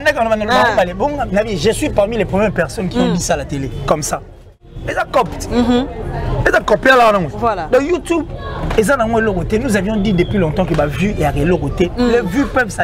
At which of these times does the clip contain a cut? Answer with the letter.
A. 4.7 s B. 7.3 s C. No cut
A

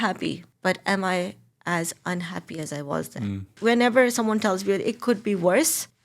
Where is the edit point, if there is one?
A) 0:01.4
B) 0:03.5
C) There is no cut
B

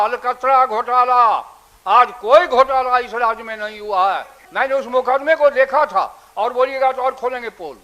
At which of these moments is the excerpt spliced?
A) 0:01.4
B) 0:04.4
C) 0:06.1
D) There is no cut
B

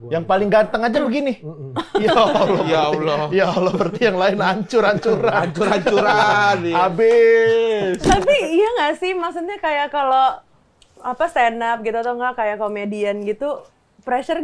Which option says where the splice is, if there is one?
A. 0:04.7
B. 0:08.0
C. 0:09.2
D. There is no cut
B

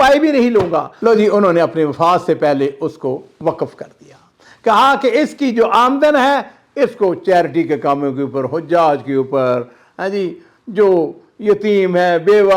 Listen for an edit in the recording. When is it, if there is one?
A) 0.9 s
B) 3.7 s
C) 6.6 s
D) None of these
A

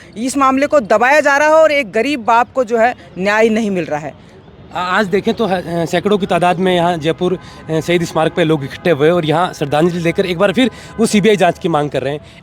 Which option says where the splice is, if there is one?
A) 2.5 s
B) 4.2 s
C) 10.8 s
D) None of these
D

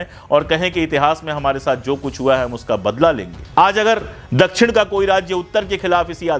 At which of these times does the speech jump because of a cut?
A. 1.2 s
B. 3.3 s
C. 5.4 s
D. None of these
B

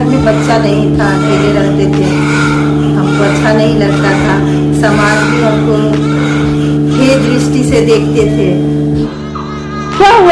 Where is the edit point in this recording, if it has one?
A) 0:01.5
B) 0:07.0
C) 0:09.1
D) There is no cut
C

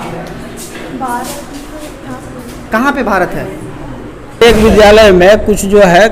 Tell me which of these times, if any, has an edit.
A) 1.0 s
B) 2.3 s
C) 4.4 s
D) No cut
C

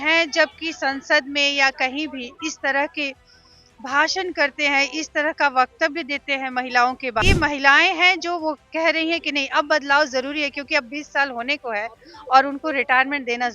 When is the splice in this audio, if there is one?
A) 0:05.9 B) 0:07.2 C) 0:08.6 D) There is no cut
B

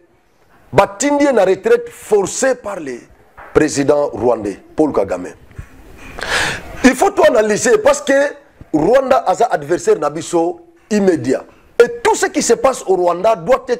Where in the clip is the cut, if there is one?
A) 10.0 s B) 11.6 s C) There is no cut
B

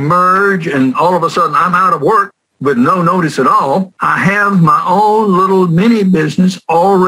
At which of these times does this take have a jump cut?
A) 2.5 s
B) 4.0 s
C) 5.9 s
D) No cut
B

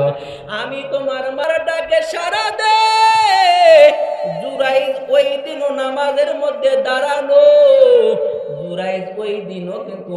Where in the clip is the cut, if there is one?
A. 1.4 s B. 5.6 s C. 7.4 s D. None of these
A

